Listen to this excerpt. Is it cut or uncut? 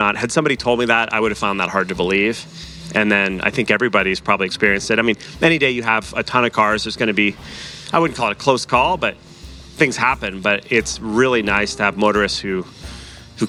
uncut